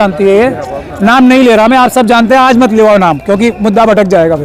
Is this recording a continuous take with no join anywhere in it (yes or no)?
yes